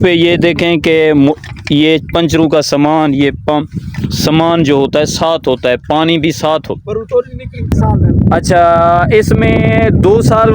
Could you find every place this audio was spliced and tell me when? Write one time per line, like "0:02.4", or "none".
0:07.7